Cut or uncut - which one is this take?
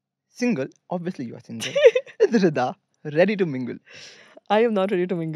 uncut